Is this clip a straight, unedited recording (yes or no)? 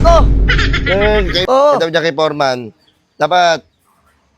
no